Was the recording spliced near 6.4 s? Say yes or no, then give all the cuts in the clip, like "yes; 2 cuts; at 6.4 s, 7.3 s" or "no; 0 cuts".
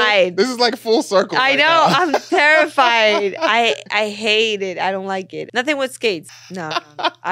yes; 2 cuts; at 5.4 s, 6.4 s